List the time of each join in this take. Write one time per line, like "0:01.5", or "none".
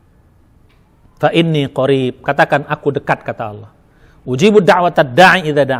none